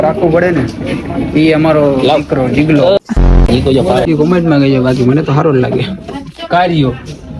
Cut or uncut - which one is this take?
cut